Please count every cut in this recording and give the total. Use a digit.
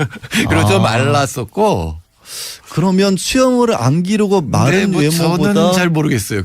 1